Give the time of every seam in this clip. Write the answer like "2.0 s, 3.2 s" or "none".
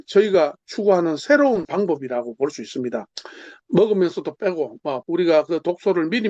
1.7 s, 5.0 s